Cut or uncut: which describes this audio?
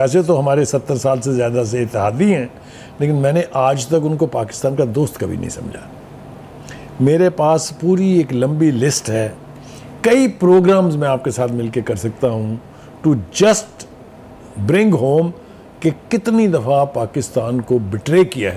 uncut